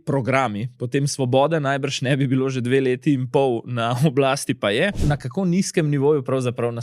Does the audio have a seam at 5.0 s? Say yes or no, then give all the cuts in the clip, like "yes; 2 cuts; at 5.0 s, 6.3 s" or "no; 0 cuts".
yes; 1 cut; at 5.0 s